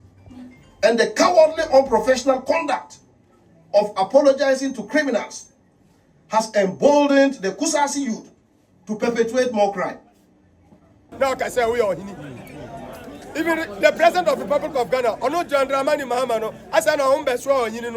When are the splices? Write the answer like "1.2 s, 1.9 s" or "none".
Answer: 11.1 s